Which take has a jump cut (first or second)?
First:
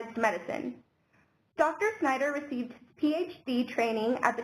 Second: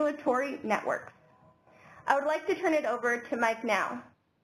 first